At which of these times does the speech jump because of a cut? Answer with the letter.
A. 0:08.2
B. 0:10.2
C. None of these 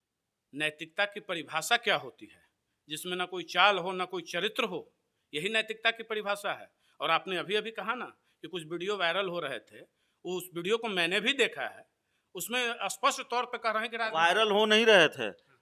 C